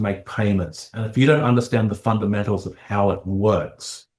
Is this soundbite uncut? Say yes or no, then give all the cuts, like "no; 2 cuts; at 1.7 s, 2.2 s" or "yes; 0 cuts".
yes; 0 cuts